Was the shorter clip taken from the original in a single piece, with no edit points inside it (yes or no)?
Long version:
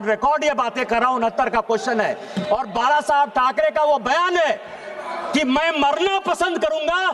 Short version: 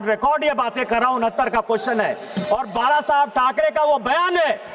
yes